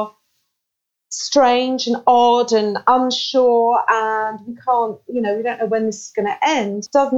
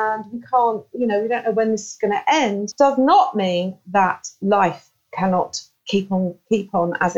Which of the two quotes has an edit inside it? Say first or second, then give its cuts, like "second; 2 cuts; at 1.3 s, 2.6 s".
second; 1 cut; at 4.4 s